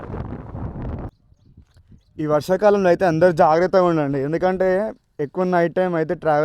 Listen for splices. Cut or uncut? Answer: cut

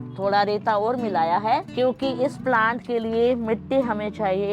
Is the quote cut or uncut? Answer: cut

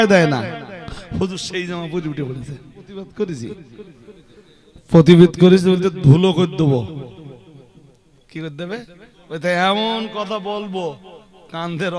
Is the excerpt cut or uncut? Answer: cut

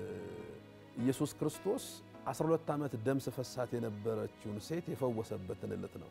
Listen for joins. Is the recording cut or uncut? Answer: uncut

